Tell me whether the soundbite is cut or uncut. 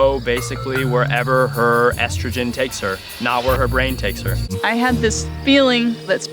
cut